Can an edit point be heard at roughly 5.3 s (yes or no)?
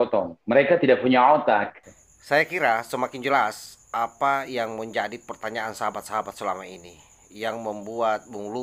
no